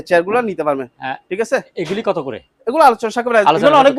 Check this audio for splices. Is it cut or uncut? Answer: uncut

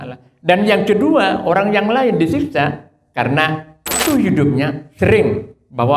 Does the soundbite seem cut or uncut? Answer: cut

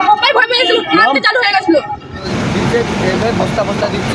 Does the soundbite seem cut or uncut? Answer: cut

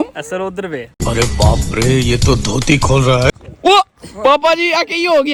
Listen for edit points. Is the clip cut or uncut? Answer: uncut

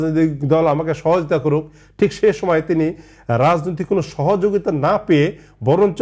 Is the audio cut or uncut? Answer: uncut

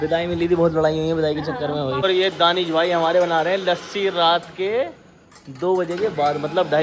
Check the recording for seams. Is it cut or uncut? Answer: cut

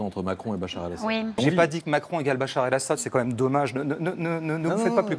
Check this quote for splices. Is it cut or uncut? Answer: cut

